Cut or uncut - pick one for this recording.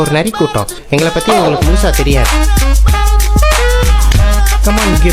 uncut